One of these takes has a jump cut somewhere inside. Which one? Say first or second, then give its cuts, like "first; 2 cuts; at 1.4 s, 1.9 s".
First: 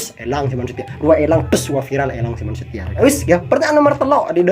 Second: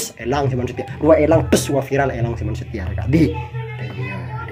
first; 1 cut; at 3.0 s